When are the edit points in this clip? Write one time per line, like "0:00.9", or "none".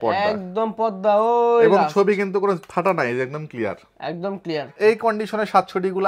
0:04.7